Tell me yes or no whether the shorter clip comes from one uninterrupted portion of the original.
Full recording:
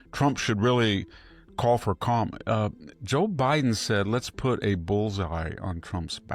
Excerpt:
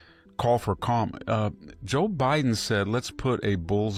yes